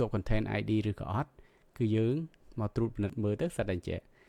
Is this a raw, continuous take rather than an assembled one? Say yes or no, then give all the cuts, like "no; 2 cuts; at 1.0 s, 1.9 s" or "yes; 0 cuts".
no; 1 cut; at 3.1 s